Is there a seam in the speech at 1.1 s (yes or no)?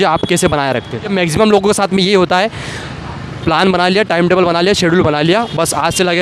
yes